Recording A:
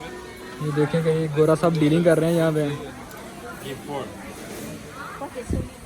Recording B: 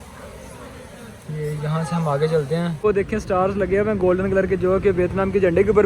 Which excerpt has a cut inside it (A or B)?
B